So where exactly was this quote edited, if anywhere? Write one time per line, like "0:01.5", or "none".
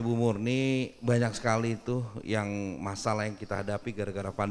none